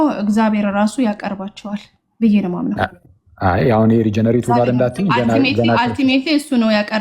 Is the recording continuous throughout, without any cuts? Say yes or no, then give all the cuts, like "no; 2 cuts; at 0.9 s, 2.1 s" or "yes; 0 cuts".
yes; 0 cuts